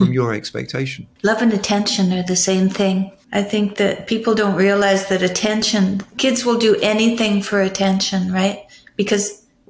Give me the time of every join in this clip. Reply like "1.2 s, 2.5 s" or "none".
1.0 s, 3.2 s

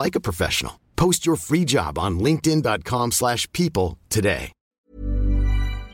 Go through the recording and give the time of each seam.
4.6 s

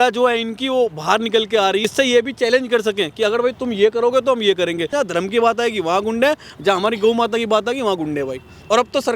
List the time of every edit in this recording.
1.8 s, 4.9 s

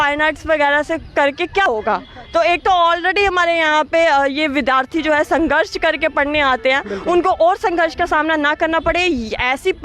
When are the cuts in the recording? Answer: 1.7 s

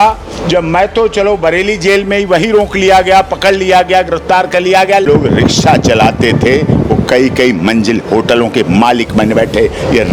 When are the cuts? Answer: 5.1 s

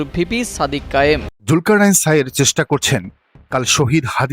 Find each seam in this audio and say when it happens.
1.3 s

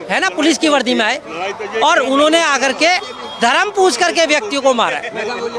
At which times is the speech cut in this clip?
none

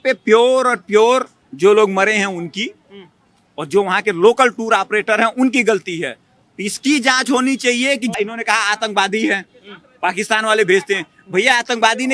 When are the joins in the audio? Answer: 8.1 s

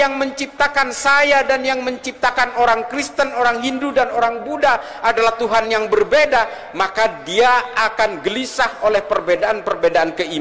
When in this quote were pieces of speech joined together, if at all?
none

